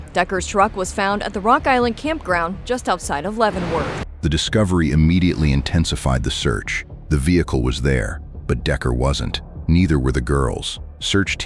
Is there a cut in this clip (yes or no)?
no